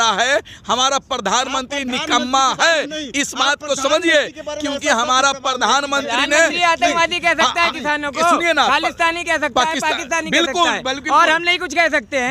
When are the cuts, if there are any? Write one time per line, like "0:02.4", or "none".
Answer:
none